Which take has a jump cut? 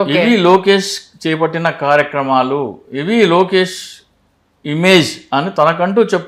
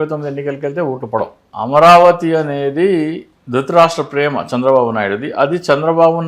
second; 2 cuts; at 1.4 s, 3.3 s

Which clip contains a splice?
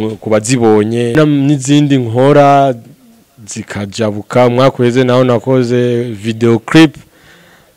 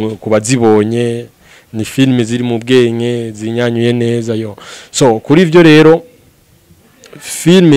first; 1 cut; at 1.1 s

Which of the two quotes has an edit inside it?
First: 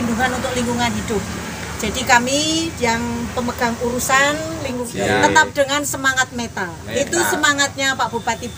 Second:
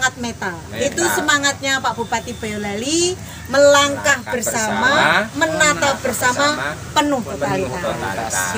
first; 1 cut; at 4.9 s

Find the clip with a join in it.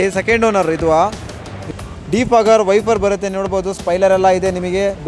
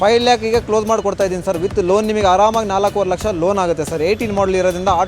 first; 1 cut; at 1.6 s

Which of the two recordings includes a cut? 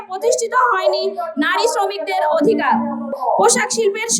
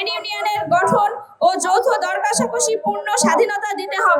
first; 1 cut; at 3.1 s

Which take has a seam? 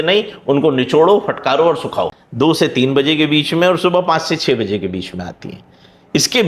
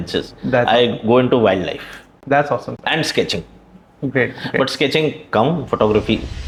first; 1 cut; at 2.2 s

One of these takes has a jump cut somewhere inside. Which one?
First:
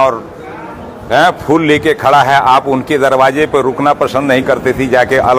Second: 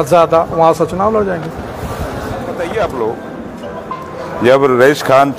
second; 1 cut; at 2.5 s

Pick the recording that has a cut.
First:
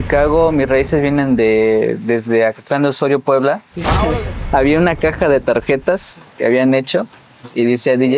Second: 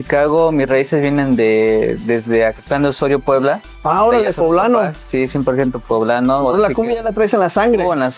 first; 1 cut; at 3.9 s

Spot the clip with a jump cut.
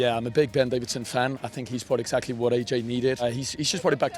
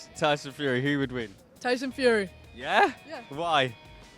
first; 1 cut; at 3.2 s

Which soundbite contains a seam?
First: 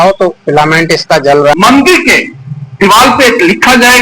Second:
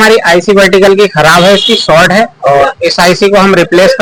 first; 1 cut; at 1.5 s

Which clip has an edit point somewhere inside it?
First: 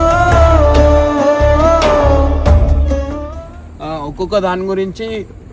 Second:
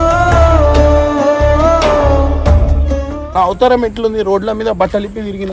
second; 1 cut; at 3.2 s

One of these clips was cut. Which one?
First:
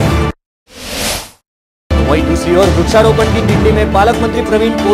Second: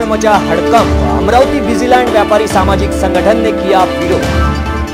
first; 1 cut; at 1.9 s

